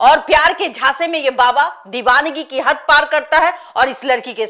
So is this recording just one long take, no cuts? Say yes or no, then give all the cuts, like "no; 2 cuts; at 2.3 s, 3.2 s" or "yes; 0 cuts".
yes; 0 cuts